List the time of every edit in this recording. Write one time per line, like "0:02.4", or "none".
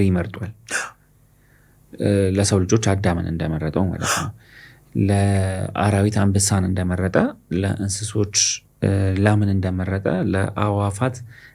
none